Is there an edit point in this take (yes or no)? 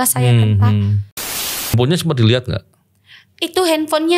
yes